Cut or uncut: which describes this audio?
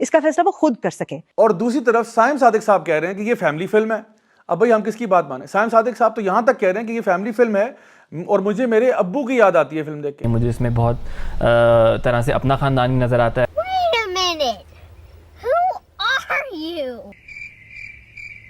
cut